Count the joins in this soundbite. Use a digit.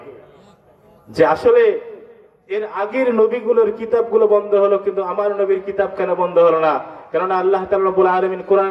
0